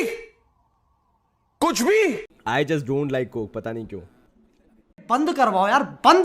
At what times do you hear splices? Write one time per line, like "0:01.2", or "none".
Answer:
0:02.3